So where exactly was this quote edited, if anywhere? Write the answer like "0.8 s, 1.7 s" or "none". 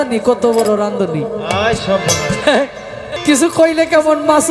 3.1 s